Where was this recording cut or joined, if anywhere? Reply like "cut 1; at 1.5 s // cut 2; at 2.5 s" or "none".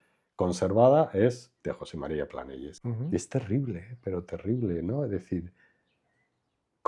cut 1; at 2.7 s